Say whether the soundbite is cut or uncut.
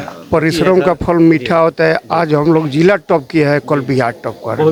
uncut